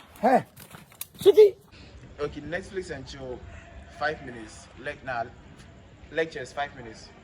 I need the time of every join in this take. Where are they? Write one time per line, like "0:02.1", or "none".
0:01.7